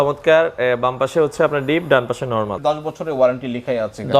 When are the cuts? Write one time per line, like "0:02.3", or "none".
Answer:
0:02.6